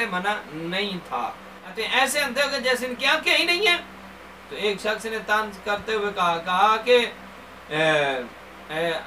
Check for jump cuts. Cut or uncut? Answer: cut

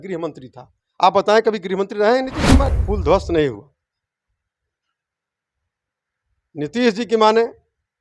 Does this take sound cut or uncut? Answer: cut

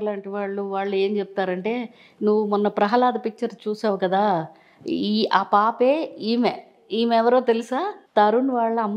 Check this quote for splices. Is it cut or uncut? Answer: cut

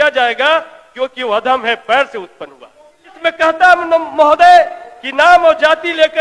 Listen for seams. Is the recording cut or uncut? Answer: cut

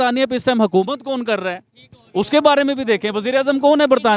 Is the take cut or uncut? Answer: uncut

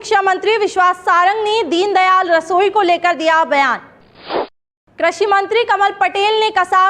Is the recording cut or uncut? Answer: cut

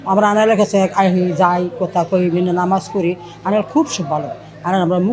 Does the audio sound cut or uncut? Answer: uncut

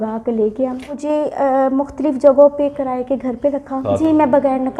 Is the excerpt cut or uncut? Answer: cut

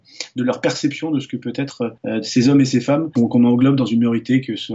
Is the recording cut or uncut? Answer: cut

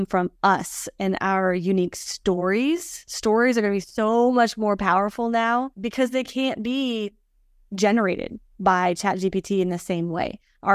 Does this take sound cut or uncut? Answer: uncut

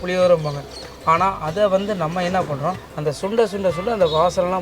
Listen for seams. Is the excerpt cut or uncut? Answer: cut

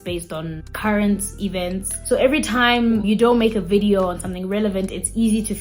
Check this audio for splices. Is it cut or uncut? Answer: uncut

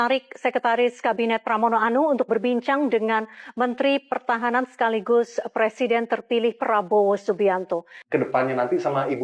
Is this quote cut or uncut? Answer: cut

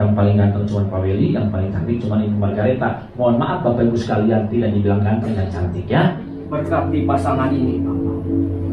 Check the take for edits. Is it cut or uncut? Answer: cut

